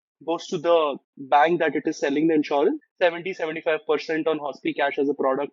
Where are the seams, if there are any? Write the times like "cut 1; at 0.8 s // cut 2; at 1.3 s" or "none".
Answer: cut 1; at 2.9 s